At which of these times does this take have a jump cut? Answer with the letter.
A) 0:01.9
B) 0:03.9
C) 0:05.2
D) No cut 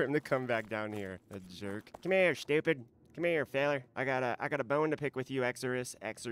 A